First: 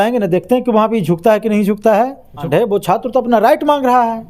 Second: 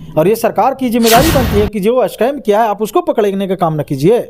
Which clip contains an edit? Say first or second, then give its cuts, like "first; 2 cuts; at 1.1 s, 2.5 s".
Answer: first; 1 cut; at 2.4 s